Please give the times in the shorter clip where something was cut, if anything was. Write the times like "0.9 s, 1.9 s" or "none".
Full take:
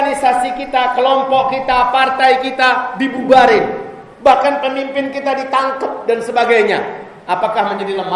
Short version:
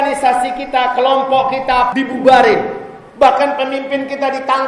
1.9 s